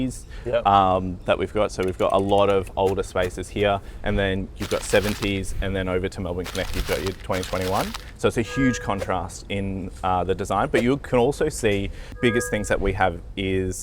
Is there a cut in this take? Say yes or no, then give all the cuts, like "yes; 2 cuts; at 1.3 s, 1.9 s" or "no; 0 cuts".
yes; 1 cut; at 12.0 s